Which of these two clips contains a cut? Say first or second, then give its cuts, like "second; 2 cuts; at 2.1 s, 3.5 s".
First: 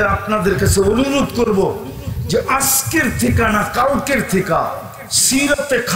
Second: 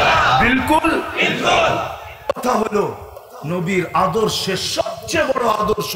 second; 1 cut; at 2.3 s